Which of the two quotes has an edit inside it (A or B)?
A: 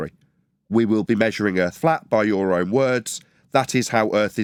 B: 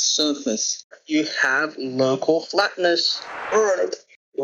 B